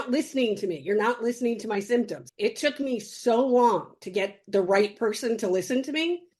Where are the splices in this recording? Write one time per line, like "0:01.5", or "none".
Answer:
0:02.2